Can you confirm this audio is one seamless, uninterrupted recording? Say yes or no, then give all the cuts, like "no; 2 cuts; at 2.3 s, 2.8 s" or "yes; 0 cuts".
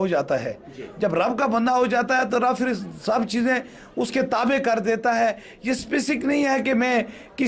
yes; 0 cuts